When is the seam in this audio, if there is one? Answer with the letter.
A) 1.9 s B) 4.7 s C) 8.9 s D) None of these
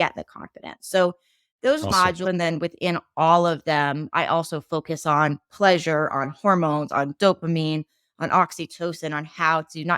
A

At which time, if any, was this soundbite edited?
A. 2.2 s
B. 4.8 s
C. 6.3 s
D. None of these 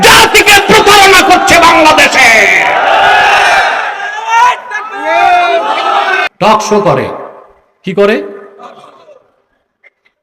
C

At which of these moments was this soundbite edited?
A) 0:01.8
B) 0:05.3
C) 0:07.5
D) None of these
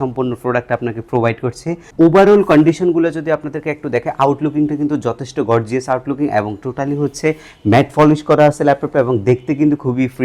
A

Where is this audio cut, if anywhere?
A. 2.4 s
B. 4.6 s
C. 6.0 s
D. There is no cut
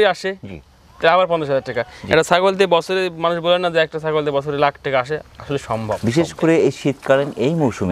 C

